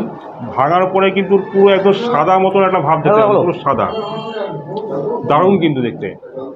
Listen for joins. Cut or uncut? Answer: uncut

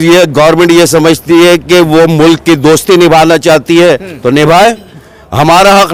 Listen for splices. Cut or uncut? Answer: uncut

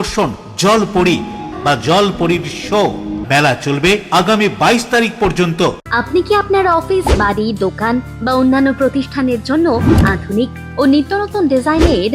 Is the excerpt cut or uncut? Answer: cut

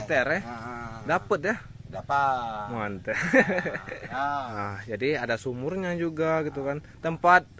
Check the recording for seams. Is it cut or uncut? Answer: cut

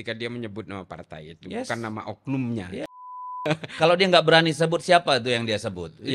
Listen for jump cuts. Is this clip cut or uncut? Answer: cut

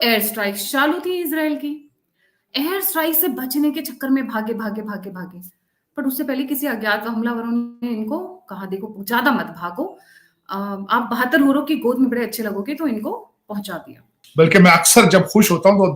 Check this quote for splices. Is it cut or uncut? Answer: cut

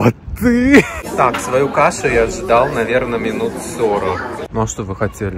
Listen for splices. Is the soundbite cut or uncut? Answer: cut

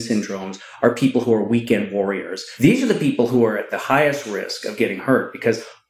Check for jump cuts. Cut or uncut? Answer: cut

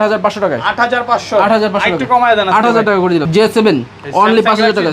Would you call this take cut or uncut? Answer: cut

